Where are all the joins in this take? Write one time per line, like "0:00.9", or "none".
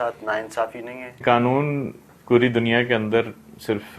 0:01.2